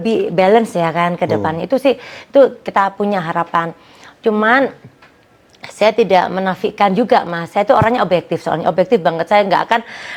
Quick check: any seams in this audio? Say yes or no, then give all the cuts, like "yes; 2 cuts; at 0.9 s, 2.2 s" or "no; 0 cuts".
no; 0 cuts